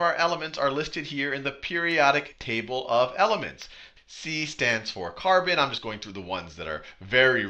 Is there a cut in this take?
no; 0 cuts

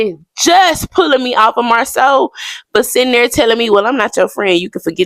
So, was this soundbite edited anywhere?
no; 0 cuts

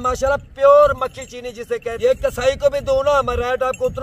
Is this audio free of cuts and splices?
no; 1 cut; at 1.9 s

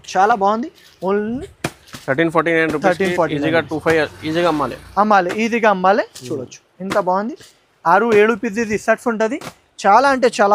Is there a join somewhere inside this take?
no; 0 cuts

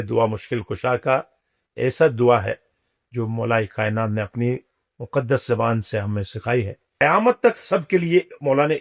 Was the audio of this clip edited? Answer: yes; 1 cut; at 7.0 s

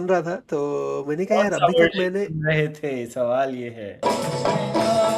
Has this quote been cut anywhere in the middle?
yes; 1 cut; at 3.9 s

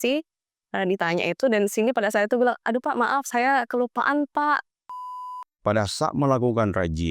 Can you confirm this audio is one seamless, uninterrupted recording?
no; 1 cut; at 5.0 s

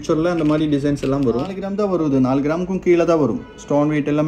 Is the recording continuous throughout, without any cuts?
no; 1 cut; at 1.6 s

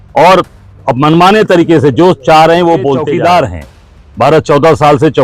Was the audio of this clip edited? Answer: yes; 1 cut; at 3.0 s

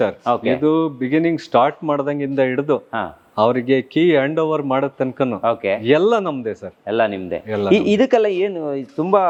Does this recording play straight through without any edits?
yes; 0 cuts

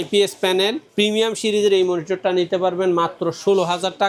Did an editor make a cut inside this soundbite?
no; 0 cuts

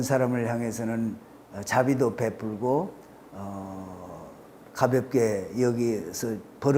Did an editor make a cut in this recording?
no; 0 cuts

